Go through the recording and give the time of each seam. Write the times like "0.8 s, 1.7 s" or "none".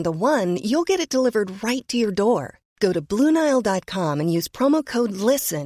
none